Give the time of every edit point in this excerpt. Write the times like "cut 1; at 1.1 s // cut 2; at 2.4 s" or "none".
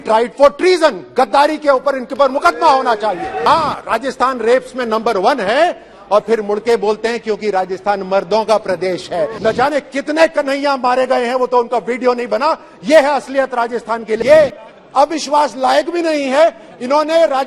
cut 1; at 3.4 s // cut 2; at 9.3 s // cut 3; at 14.2 s